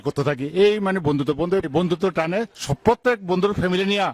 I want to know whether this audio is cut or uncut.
cut